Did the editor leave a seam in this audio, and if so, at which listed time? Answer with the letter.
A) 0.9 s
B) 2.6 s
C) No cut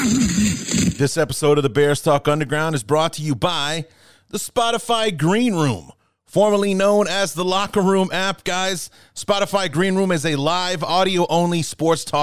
A